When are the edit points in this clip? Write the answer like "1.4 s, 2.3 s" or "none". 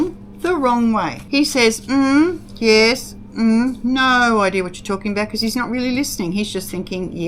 1.2 s